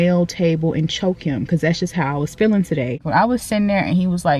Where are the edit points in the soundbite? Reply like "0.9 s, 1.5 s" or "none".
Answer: 3.1 s